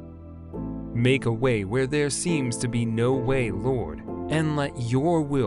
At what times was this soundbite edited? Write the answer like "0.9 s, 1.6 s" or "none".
1.0 s